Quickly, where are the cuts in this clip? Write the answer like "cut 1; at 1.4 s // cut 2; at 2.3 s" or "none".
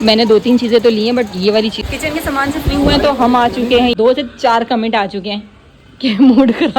cut 1; at 1.8 s // cut 2; at 3.9 s